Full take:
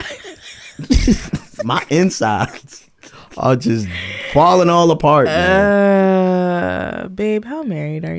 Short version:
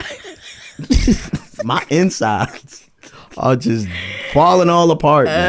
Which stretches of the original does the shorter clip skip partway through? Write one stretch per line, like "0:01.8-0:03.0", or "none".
none